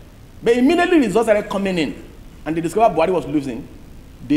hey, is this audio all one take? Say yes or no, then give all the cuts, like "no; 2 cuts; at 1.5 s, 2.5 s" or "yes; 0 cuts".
yes; 0 cuts